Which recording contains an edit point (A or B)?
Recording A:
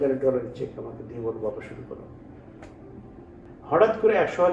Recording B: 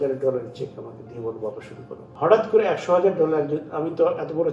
B